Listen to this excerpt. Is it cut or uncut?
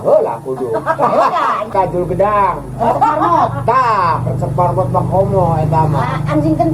cut